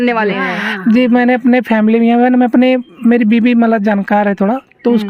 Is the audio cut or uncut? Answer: uncut